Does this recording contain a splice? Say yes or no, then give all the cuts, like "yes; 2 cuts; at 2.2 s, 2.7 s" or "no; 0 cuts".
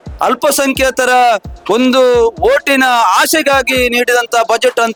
no; 0 cuts